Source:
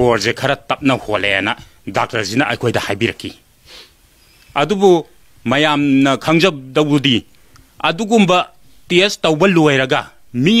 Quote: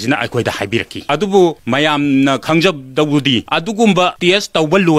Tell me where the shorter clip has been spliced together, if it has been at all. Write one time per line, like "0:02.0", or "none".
0:01.0
0:01.6
0:03.5
0:04.2